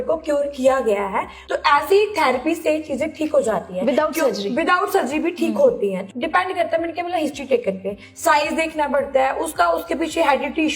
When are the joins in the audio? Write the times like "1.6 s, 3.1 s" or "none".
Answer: 1.4 s, 6.0 s